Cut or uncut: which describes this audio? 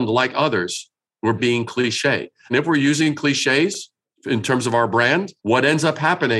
cut